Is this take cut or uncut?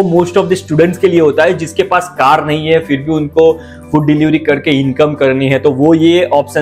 uncut